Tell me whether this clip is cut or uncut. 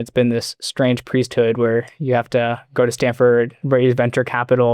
cut